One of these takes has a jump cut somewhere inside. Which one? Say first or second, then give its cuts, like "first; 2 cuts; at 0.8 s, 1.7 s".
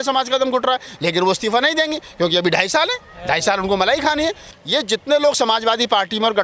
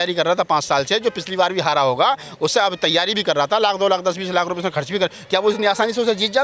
first; 1 cut; at 4.5 s